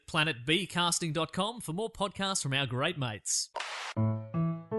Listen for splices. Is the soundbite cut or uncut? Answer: cut